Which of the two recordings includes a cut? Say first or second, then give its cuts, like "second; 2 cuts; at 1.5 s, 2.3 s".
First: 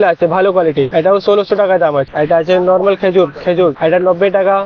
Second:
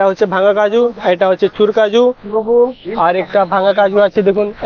first; 3 cuts; at 0.9 s, 2.1 s, 3.8 s